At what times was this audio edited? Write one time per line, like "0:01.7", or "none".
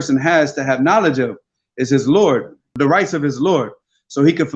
0:02.7